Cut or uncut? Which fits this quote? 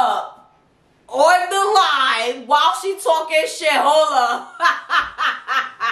uncut